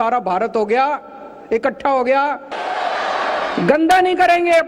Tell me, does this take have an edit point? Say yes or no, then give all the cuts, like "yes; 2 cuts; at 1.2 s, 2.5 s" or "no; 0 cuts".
yes; 1 cut; at 2.5 s